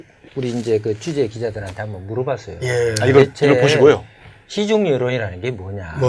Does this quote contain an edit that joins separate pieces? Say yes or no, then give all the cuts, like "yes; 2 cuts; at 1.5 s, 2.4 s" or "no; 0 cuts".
yes; 1 cut; at 1.8 s